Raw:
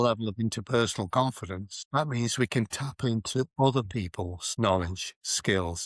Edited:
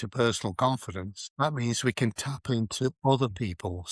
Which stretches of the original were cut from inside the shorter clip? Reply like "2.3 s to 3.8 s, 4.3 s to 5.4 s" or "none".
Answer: none